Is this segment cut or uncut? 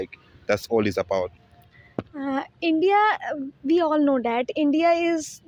uncut